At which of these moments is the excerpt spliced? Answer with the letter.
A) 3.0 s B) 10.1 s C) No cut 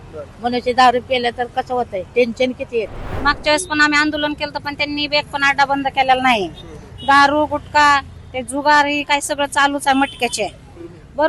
A